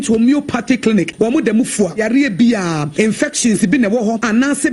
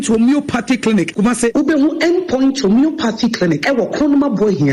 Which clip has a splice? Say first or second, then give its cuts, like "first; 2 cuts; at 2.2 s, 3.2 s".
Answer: first; 1 cut; at 1.0 s